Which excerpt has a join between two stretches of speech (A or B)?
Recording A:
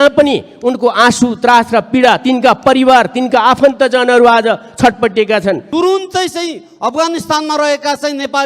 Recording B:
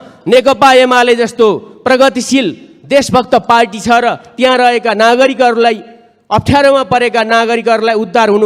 A